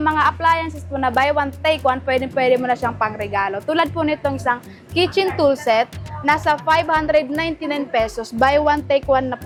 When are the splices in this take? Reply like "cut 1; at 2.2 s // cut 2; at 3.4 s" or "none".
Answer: none